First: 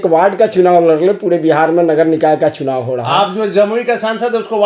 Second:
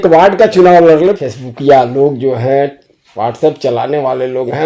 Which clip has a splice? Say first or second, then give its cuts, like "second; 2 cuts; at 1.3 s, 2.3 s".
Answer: second; 1 cut; at 1.2 s